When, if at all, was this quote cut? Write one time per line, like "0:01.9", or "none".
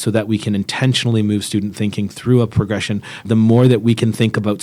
0:03.3